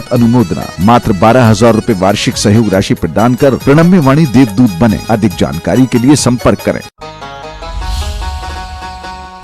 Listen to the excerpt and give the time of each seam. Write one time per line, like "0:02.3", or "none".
0:06.9